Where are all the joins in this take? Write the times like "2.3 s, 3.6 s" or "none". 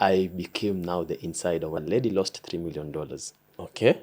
1.8 s